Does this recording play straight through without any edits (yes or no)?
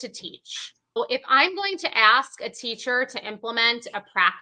no